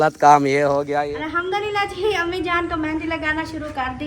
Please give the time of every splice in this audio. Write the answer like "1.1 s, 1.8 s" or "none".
0.9 s